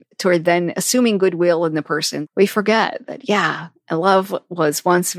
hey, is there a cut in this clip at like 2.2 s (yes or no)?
yes